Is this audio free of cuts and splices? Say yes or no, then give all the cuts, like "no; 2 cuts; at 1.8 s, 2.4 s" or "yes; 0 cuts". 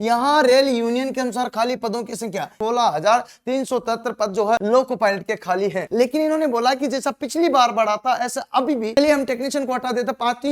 no; 4 cuts; at 2.5 s, 4.6 s, 5.8 s, 9.0 s